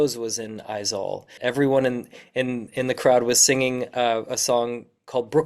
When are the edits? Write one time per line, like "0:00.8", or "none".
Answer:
0:01.3